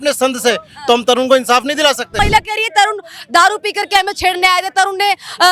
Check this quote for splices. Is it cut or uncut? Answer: cut